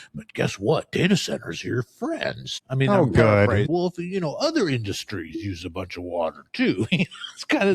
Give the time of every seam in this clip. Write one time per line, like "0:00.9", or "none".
0:02.5
0:03.6

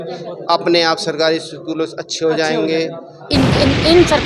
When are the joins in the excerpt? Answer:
0:03.3

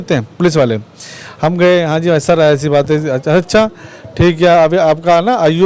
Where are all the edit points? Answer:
none

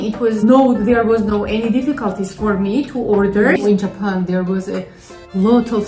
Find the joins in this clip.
0:03.6

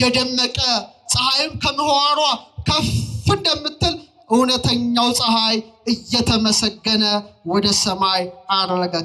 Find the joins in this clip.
none

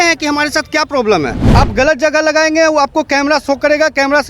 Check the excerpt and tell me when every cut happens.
0:01.4

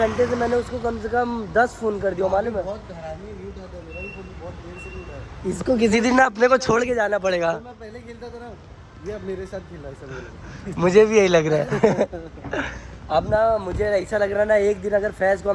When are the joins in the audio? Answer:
none

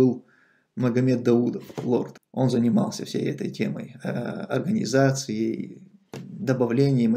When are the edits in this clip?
0:02.2

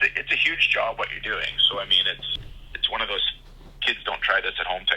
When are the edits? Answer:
0:02.3

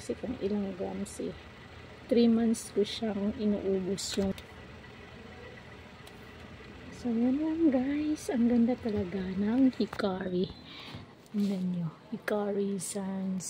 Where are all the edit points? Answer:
0:04.3

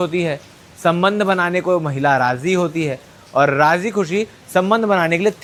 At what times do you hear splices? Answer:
none

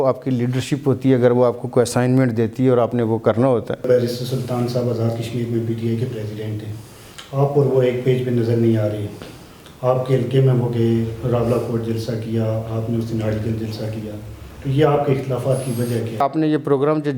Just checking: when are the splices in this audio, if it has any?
0:03.9
0:16.2

